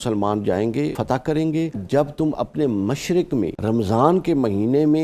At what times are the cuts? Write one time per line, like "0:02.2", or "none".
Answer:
0:01.0
0:01.8
0:03.6